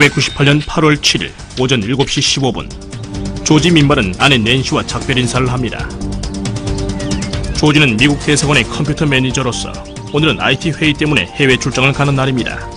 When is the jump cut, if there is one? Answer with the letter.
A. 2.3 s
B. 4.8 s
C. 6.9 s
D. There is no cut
A